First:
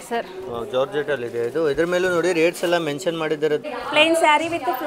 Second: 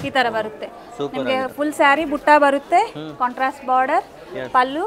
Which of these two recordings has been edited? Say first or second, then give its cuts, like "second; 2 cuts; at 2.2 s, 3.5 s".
first; 1 cut; at 3.6 s